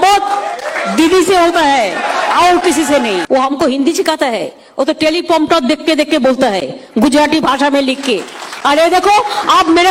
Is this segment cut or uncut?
cut